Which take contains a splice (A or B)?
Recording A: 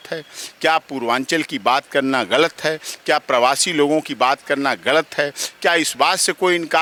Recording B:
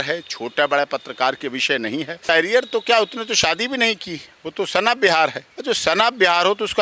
B